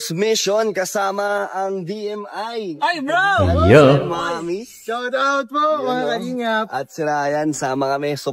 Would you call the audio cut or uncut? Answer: uncut